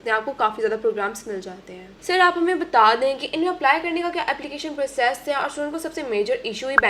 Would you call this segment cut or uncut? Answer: uncut